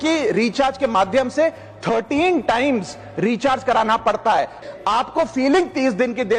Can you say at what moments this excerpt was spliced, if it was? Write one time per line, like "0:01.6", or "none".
0:04.6